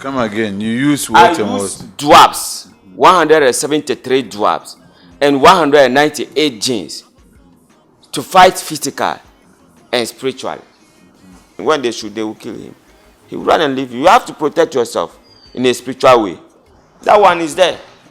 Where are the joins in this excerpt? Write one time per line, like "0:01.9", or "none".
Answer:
0:11.5